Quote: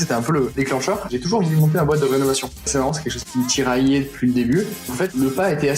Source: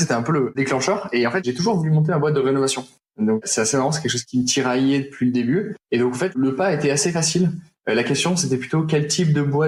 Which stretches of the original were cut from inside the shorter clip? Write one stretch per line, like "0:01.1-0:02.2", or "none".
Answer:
0:01.1-0:01.4
0:03.0-0:03.7
0:05.9-0:06.1